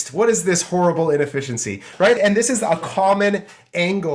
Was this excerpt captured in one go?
no; 1 cut; at 2.2 s

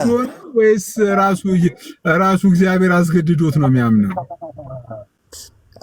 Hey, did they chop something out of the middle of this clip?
no; 0 cuts

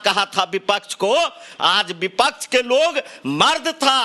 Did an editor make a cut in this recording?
yes; 1 cut; at 1.4 s

